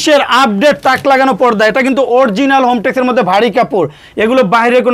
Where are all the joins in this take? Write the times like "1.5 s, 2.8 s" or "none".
none